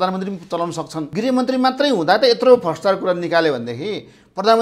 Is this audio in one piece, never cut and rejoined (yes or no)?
no